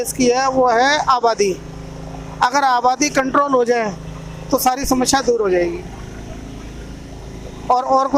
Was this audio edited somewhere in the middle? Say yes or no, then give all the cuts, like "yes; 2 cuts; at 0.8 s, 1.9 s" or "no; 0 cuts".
no; 0 cuts